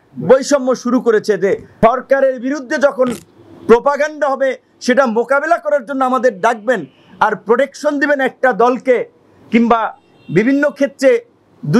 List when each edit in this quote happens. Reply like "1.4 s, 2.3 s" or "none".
1.7 s